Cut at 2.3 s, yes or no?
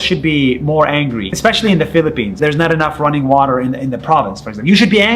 yes